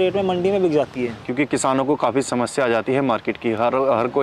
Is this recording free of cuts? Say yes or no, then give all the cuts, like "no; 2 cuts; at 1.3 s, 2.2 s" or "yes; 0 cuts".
yes; 0 cuts